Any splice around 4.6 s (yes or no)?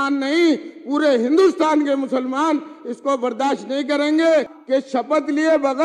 yes